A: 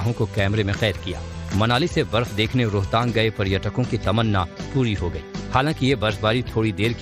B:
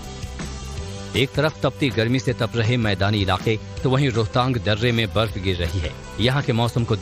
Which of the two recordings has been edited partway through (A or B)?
B